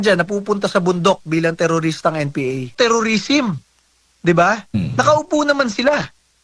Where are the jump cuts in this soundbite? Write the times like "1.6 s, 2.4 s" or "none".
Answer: 2.7 s

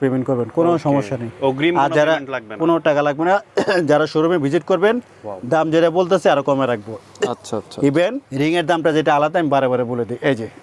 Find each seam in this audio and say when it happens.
none

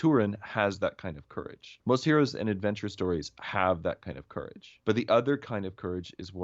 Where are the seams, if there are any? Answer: 1.7 s

